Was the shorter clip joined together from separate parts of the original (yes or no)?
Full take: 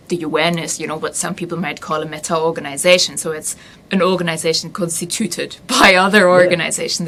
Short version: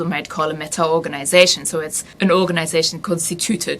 yes